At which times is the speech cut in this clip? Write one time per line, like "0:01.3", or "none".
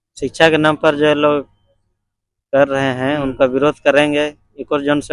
none